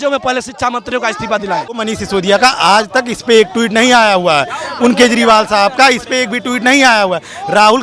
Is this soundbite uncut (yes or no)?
no